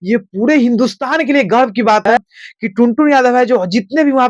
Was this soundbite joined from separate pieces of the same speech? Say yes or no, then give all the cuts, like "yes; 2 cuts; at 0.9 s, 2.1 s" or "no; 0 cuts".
yes; 1 cut; at 2.4 s